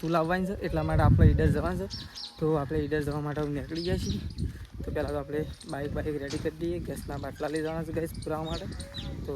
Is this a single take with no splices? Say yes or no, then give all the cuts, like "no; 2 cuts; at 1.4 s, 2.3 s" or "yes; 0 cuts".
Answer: yes; 0 cuts